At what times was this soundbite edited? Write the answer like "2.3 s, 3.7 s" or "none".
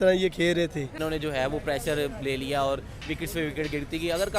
1.0 s